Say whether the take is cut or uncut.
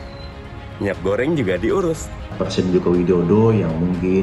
cut